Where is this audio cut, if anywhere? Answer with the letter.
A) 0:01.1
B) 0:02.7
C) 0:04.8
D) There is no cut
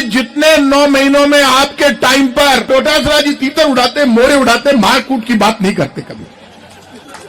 B